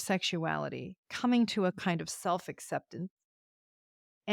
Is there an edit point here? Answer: no; 0 cuts

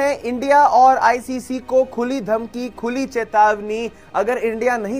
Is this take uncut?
yes; 0 cuts

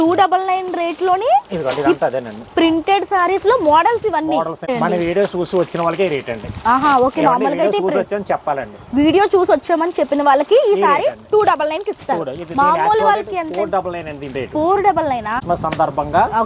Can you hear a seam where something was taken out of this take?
yes; 2 cuts; at 4.7 s, 15.3 s

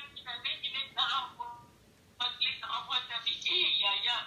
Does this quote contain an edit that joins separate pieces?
no; 0 cuts

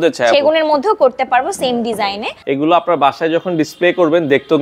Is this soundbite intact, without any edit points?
no; 1 cut; at 2.4 s

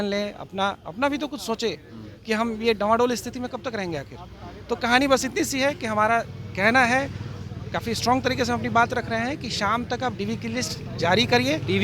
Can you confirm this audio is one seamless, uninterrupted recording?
yes; 0 cuts

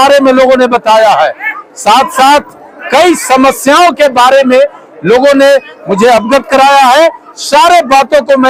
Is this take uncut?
yes; 0 cuts

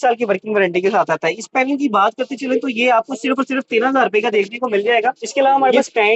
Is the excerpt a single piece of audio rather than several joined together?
no; 1 cut; at 5.2 s

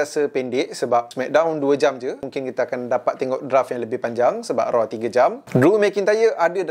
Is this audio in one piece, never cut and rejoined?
no; 3 cuts; at 1.2 s, 2.3 s, 5.4 s

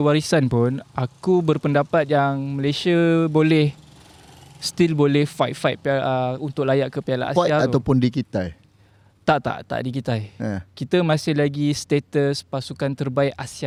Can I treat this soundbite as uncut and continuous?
yes; 0 cuts

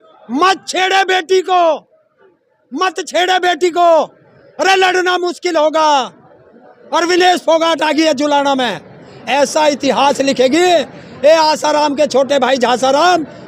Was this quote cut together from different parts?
no; 0 cuts

